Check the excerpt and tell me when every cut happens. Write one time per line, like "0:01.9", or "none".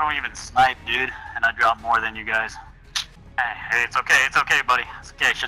0:03.4